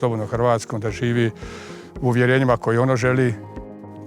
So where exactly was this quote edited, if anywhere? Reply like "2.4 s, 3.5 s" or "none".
none